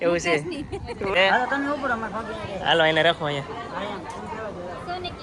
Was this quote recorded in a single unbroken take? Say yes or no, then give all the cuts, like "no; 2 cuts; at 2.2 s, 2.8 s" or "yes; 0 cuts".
no; 1 cut; at 1.1 s